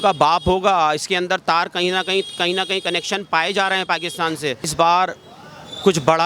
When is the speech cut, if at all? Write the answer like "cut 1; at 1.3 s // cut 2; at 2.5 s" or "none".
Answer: cut 1; at 4.7 s